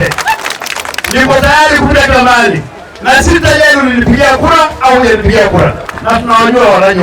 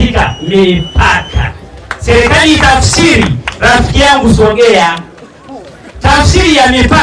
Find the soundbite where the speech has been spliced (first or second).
first